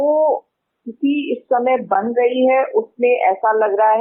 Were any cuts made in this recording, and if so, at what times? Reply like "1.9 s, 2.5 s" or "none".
none